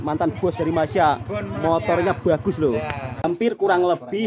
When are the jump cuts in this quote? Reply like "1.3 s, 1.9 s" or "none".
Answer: 3.1 s